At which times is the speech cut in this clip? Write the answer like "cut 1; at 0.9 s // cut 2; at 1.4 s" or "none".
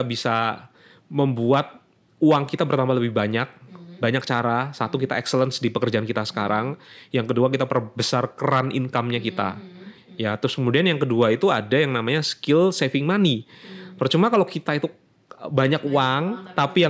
none